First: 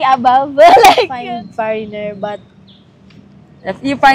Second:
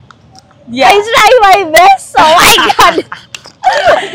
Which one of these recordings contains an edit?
first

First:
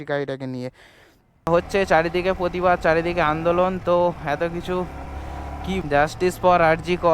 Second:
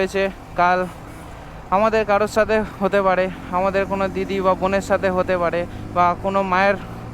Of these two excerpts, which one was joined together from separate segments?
first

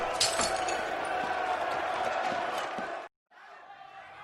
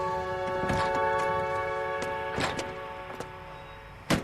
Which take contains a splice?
first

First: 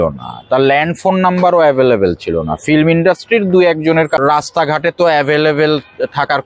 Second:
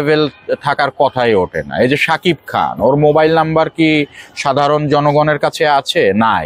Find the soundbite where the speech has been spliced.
first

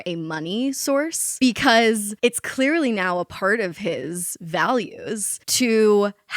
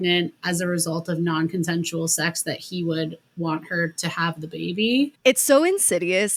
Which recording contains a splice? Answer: first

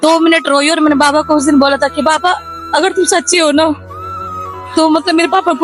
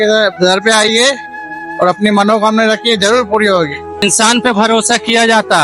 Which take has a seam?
second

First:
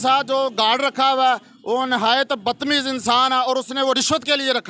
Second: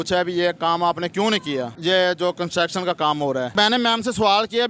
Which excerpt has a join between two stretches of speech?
second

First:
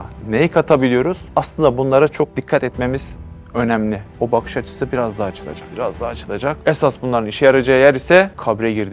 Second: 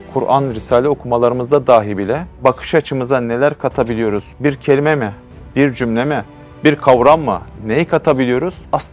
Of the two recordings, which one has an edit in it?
first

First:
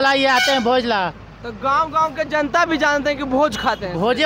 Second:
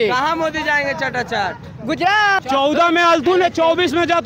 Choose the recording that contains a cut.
second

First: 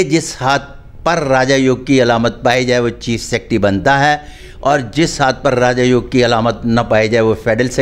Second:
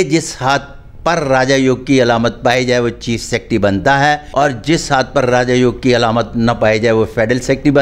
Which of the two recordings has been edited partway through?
second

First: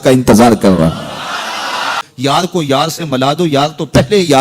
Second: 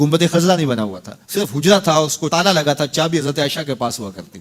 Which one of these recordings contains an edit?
first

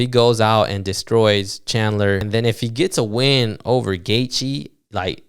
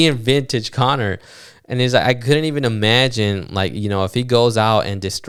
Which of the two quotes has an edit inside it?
first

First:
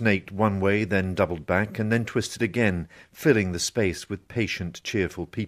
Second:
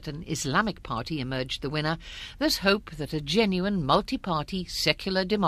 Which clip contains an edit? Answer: second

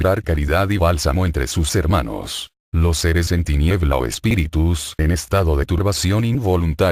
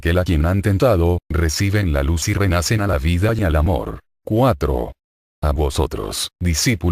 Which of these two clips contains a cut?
second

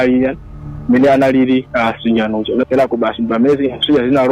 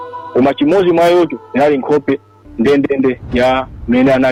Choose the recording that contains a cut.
first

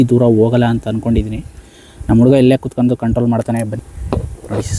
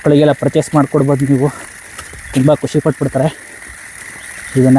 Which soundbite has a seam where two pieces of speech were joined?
first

